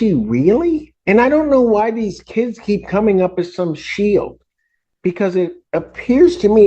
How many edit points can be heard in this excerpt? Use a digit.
1